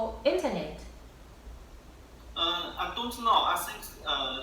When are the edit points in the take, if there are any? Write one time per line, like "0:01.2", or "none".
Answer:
none